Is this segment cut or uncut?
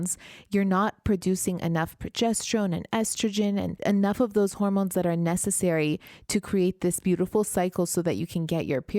cut